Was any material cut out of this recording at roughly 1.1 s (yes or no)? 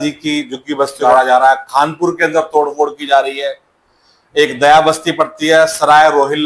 yes